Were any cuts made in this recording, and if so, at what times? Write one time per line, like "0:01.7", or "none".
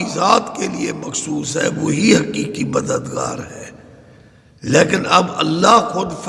none